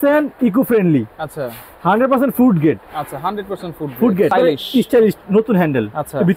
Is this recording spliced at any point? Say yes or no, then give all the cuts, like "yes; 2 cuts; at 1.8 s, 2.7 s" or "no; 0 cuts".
yes; 1 cut; at 4.3 s